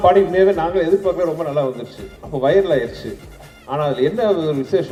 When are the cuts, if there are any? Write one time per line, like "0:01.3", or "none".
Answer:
none

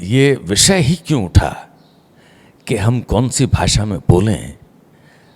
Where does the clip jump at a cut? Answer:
none

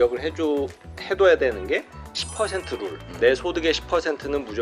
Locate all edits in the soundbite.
0:03.0

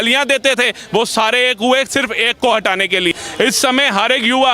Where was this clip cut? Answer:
0:03.1

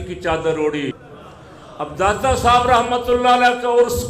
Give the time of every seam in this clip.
0:01.0

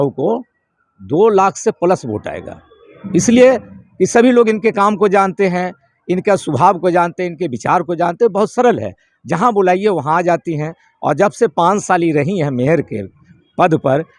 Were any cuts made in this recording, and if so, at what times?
none

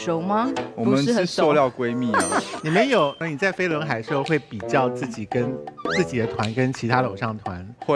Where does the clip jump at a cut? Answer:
0:03.2

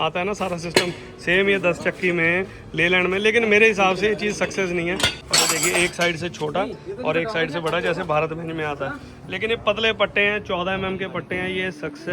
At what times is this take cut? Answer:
0:05.2

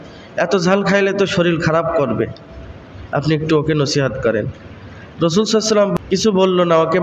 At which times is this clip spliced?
0:05.9

